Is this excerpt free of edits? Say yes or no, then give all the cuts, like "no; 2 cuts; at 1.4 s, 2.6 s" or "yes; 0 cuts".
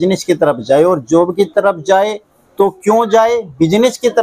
yes; 0 cuts